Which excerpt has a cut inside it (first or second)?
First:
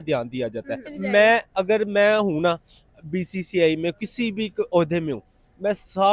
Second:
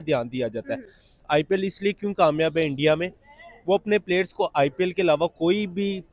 first